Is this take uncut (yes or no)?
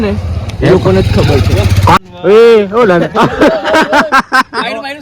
no